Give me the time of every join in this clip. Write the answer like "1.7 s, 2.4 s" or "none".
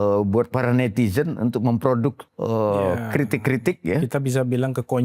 2.3 s